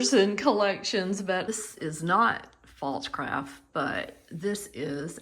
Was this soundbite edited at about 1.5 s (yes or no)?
yes